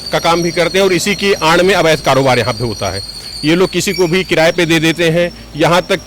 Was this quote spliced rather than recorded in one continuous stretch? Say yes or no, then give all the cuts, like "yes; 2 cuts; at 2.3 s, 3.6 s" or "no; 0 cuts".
no; 0 cuts